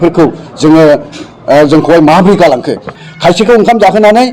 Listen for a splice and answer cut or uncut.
cut